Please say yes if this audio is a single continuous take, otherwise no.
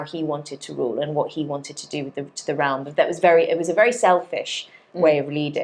yes